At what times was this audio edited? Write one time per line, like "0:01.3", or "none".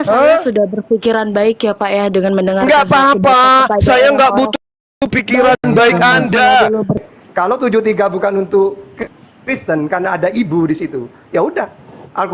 0:07.0